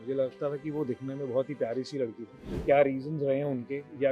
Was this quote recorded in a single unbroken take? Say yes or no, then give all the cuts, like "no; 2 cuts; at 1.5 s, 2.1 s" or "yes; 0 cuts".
no; 1 cut; at 2.5 s